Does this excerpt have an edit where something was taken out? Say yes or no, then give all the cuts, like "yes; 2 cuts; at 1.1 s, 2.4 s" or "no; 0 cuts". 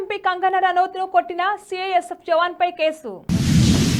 no; 0 cuts